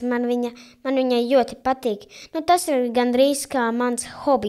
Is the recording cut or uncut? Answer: uncut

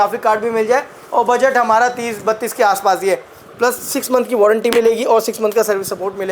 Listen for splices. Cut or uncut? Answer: cut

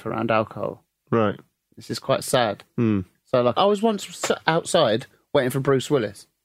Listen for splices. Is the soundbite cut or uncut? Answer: cut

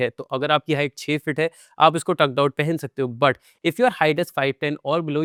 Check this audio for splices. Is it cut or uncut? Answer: uncut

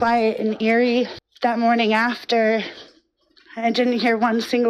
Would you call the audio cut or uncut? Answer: cut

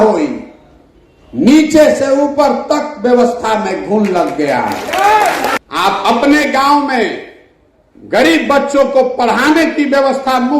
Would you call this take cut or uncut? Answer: cut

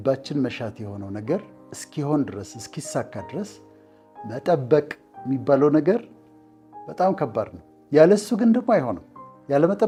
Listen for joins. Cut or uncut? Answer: uncut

